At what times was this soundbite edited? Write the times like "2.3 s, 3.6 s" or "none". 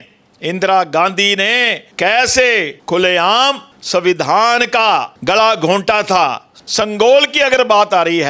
1.8 s, 2.7 s, 3.7 s, 5.1 s, 6.5 s

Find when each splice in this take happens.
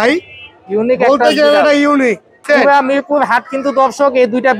2.4 s

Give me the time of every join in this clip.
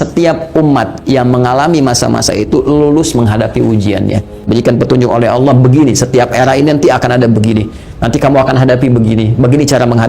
4.5 s

